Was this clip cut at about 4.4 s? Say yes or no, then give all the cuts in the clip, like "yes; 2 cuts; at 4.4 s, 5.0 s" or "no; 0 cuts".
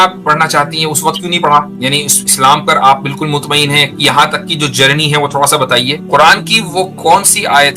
no; 2 cuts; at 1.7 s, 6.0 s